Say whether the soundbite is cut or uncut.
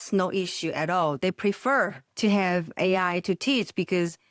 cut